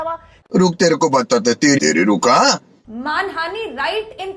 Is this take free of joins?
no; 1 cut; at 2.7 s

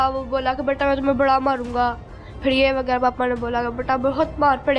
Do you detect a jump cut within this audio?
no; 0 cuts

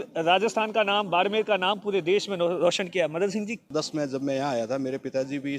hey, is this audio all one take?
no; 1 cut; at 3.7 s

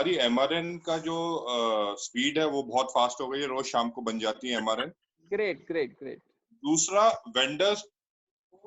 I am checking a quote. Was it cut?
no; 0 cuts

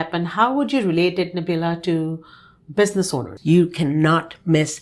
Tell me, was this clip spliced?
yes; 1 cut; at 3.3 s

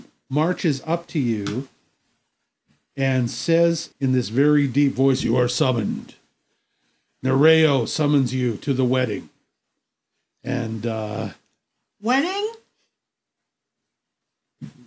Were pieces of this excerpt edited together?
yes; 1 cut; at 3.9 s

